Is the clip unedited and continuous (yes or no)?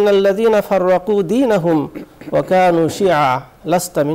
yes